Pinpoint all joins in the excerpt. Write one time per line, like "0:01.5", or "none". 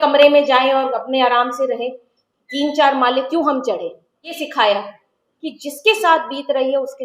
0:04.4